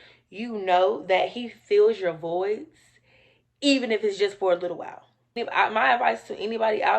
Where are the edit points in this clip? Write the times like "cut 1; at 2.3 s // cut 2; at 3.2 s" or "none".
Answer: cut 1; at 5.4 s